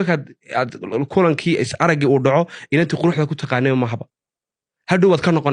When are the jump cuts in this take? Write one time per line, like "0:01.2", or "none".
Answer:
none